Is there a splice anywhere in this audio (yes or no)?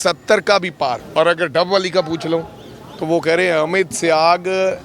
yes